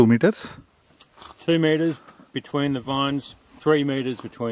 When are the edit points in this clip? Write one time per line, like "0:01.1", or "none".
0:03.5